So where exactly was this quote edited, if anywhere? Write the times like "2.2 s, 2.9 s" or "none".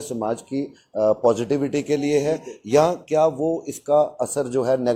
none